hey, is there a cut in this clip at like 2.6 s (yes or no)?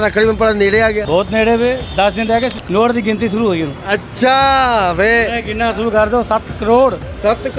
yes